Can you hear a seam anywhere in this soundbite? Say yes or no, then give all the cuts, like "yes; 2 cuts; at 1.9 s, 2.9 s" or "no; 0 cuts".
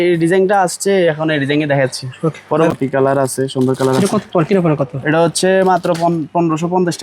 yes; 1 cut; at 2.7 s